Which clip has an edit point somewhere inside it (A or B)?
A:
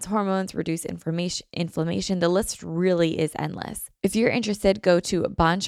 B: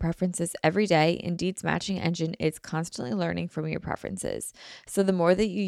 A